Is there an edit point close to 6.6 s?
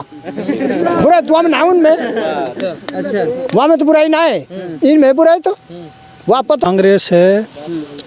yes; 1 cut; at 6.6 s

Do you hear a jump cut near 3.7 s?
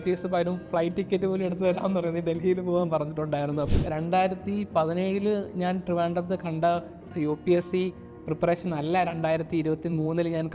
yes; 1 cut; at 3.7 s

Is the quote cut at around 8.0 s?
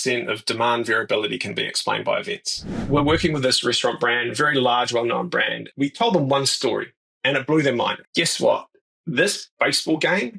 yes; 3 cuts; at 2.9 s, 5.7 s, 8.0 s

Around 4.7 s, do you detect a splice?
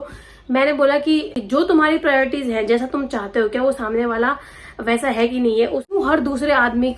no; 2 cuts; at 1.3 s, 6.0 s

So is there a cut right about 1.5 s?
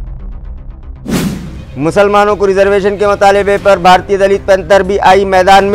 no; 0 cuts

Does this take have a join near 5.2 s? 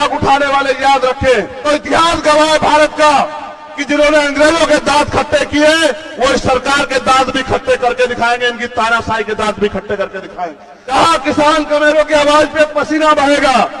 no; 2 cuts; at 1.5 s, 10.9 s

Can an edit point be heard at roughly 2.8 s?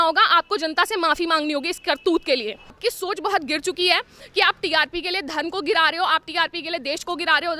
yes; 1 cut; at 2.8 s

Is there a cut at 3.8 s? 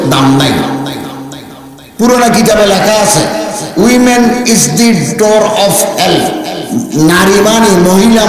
yes; 2 cuts; at 3.8 s, 6.6 s

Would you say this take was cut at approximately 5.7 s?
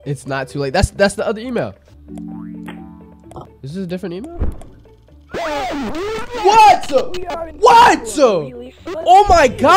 no; 1 cut; at 1.9 s

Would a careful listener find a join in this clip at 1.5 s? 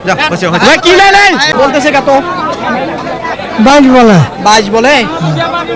yes; 1 cut; at 1.5 s

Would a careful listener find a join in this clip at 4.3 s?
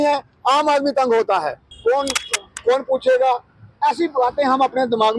no; 1 cut; at 1.6 s

